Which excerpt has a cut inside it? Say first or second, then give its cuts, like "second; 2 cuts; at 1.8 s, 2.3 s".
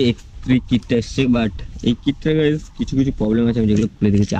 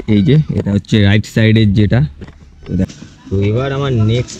second; 1 cut; at 2.9 s